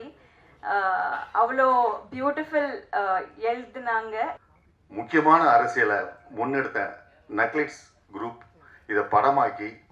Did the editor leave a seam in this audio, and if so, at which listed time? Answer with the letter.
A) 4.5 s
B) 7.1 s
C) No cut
A